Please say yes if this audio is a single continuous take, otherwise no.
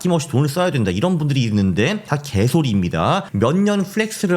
no